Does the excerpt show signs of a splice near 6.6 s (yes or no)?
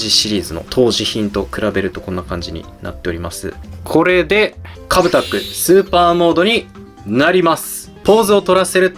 no